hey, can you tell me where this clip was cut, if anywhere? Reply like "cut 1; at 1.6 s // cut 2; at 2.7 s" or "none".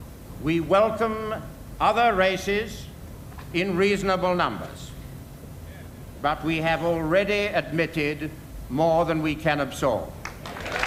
none